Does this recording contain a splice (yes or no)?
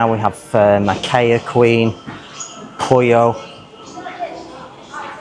no